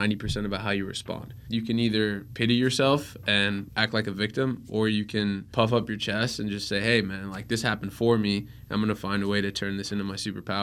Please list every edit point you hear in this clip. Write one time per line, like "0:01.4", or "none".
0:01.3
0:02.3
0:03.7
0:05.4

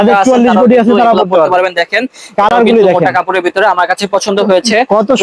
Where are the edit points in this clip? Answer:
none

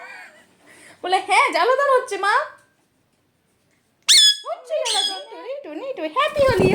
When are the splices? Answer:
0:05.2

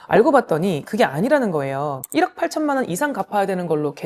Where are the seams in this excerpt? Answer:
0:02.0

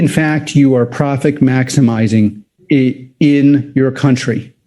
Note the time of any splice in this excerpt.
0:02.5

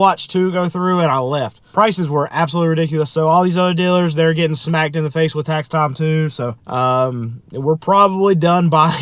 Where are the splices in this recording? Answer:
none

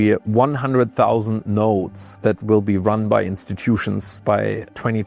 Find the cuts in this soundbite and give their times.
none

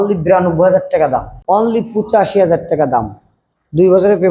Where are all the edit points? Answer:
0:01.3

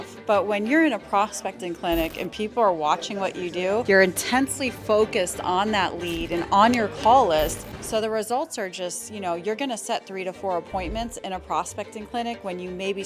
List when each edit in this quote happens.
none

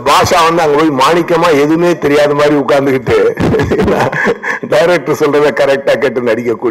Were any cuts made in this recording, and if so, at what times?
none

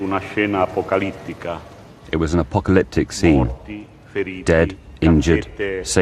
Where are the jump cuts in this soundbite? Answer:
0:02.9

